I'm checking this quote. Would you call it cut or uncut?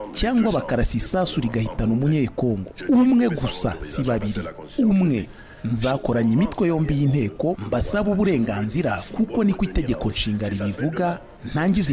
uncut